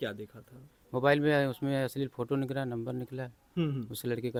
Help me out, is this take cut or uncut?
uncut